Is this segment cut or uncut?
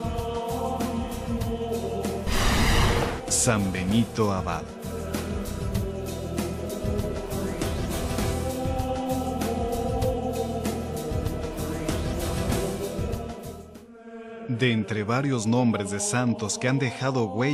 uncut